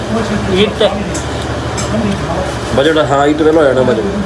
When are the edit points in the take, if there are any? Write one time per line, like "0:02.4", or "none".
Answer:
none